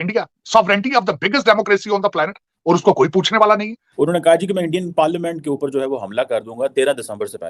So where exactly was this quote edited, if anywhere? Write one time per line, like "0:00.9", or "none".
0:03.8